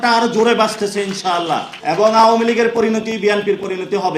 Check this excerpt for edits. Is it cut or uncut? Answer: cut